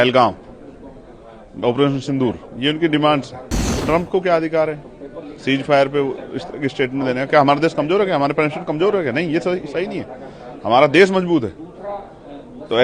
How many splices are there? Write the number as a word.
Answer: one